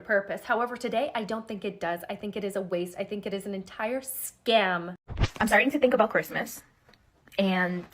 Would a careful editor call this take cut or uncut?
cut